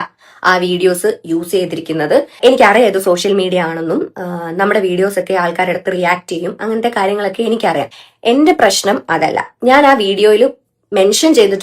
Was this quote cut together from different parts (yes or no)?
yes